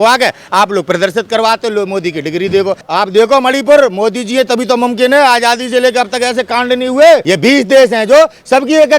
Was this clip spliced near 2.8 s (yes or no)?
yes